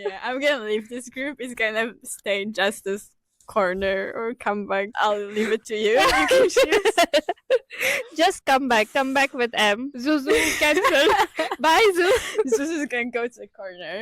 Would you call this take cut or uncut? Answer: cut